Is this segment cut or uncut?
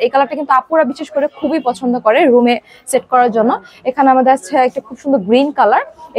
uncut